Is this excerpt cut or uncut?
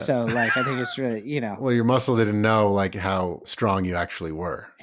cut